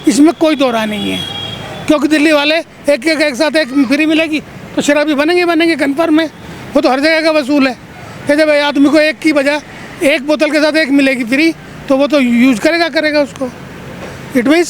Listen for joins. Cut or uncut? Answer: uncut